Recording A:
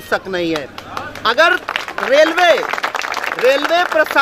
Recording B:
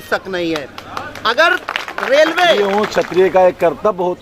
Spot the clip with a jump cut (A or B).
B